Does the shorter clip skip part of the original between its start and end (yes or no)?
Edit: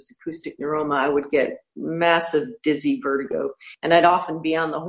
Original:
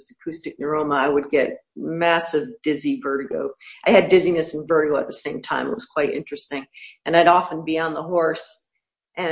yes